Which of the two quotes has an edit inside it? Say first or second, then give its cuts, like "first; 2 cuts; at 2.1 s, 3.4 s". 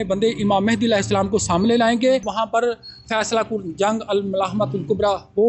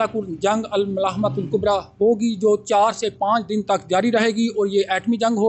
first; 1 cut; at 2.3 s